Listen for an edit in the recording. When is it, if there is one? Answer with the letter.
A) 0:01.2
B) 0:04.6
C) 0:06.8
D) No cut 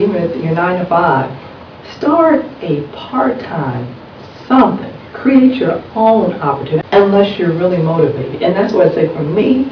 C